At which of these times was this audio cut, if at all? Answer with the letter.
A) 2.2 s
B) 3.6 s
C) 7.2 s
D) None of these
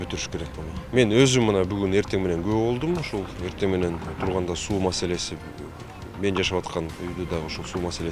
D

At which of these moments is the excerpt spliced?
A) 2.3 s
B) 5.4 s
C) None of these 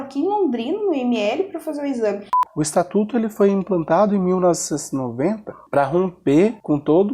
A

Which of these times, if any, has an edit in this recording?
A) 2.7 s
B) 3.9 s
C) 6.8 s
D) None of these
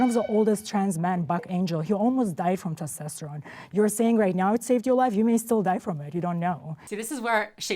C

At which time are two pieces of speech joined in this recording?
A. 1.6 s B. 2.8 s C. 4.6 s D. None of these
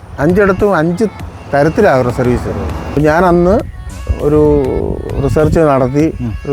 B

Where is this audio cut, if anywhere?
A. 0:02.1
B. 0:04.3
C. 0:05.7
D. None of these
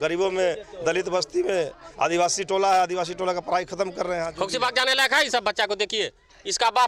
B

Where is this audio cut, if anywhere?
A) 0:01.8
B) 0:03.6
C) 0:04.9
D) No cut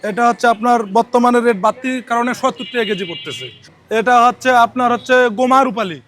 B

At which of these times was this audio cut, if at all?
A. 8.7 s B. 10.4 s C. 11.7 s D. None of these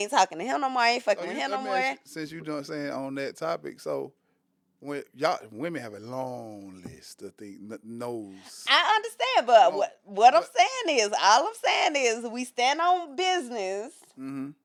D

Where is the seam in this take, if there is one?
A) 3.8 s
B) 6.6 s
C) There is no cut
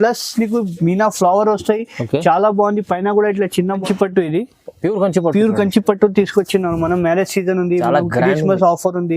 A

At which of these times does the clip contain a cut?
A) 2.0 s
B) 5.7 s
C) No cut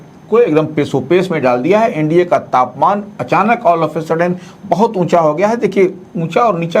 C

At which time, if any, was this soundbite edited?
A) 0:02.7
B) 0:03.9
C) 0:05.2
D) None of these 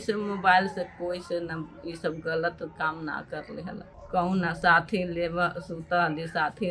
B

